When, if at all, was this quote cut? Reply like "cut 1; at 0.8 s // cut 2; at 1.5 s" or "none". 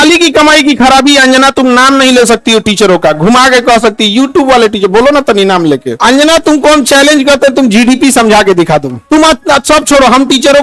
cut 1; at 6.0 s

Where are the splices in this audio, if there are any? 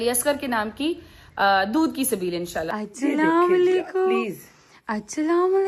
cut 1; at 2.7 s

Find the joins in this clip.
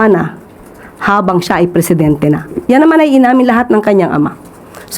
cut 1; at 2.5 s

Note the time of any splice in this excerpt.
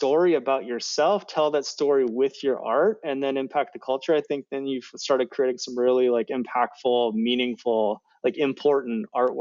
none

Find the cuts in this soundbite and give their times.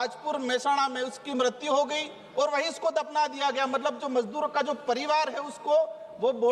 none

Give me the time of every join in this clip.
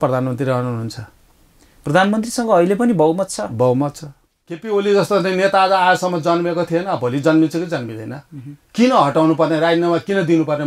cut 1; at 4.6 s

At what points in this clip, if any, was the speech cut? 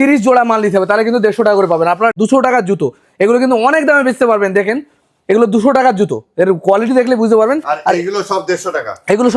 cut 1; at 2.1 s

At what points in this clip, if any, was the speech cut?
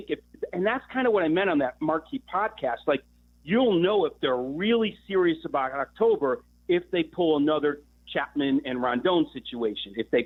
none

